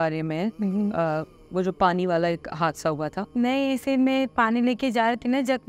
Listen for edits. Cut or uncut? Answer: cut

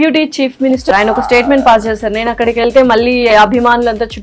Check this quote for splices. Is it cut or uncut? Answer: cut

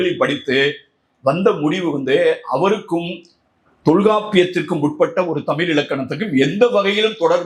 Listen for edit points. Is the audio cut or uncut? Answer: uncut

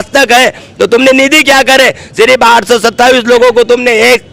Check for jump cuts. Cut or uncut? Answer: uncut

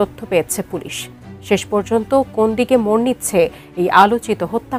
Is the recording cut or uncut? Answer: uncut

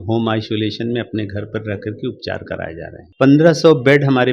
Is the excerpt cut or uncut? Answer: cut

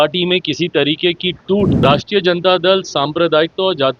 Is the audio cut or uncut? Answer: cut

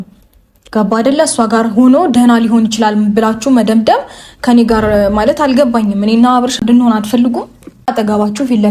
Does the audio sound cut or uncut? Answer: cut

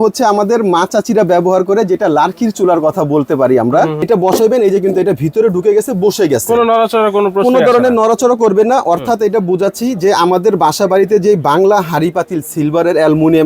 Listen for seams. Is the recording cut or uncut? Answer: cut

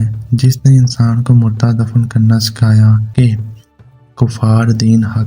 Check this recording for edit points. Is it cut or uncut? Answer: cut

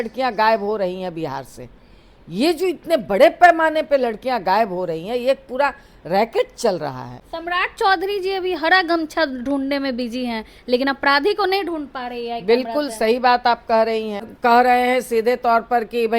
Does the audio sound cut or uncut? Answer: cut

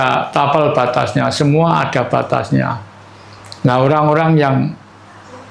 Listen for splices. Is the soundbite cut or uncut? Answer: uncut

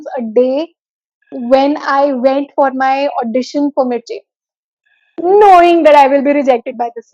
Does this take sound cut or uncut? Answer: uncut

